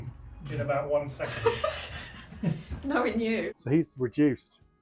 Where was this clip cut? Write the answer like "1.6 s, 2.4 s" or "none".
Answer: 3.5 s